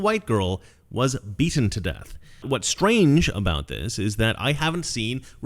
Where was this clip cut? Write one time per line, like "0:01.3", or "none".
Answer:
0:02.4